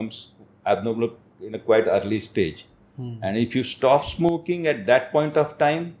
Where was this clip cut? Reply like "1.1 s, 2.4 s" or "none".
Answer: none